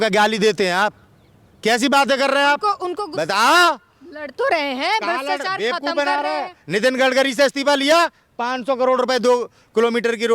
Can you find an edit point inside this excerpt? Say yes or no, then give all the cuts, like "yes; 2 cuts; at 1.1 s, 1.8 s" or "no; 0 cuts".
yes; 1 cut; at 2.9 s